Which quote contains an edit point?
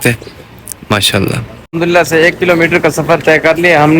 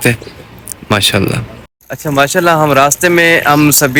first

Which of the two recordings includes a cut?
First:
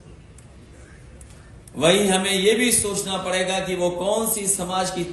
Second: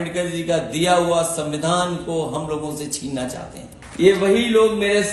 second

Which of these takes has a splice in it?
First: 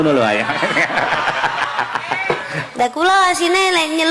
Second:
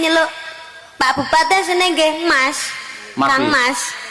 first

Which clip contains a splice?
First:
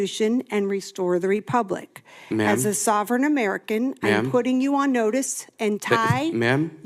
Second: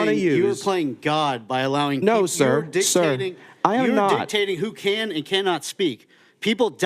second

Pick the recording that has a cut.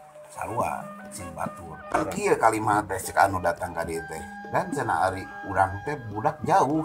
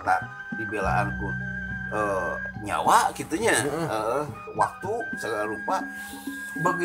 first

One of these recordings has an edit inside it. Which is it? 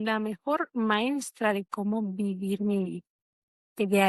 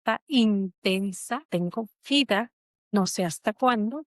second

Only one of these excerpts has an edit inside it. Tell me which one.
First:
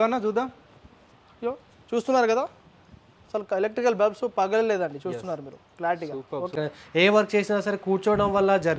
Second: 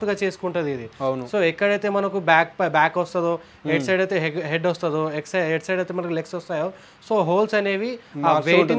first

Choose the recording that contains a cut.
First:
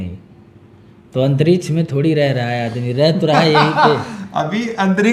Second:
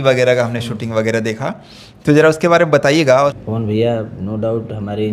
second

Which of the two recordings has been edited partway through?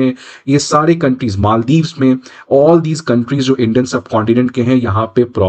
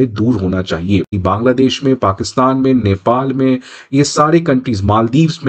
second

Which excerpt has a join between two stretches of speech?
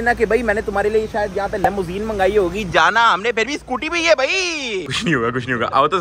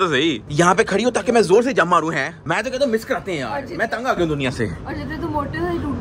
first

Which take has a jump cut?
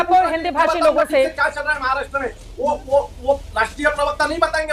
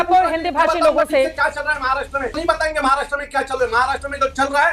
second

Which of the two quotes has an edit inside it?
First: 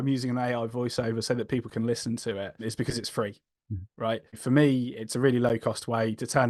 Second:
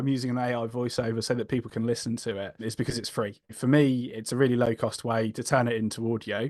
second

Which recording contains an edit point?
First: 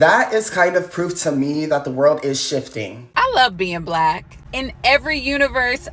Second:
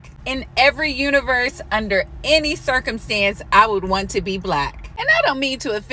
first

